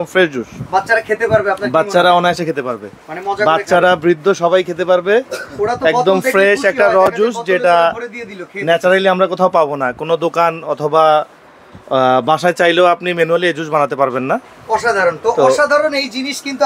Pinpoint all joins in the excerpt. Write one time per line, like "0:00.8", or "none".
none

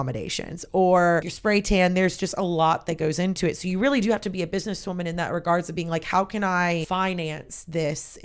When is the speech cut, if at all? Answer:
0:01.3
0:06.9

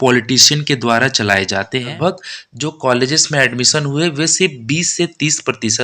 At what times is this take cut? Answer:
0:01.9

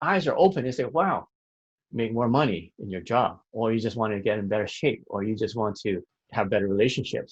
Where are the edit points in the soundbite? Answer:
0:01.8
0:06.2

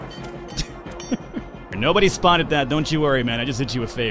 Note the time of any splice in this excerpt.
0:01.7

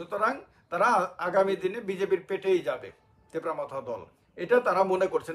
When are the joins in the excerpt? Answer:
none

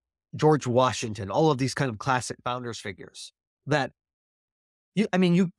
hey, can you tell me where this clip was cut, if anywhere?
none

